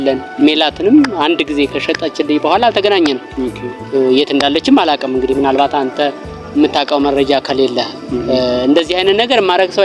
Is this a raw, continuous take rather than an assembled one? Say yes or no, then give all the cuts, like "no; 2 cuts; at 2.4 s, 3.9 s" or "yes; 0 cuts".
yes; 0 cuts